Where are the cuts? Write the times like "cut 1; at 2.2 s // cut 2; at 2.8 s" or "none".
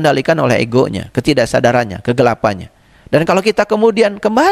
none